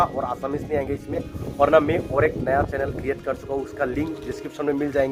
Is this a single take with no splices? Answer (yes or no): yes